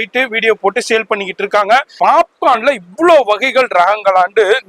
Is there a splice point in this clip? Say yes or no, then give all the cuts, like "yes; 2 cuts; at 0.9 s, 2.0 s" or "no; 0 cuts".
yes; 1 cut; at 1.9 s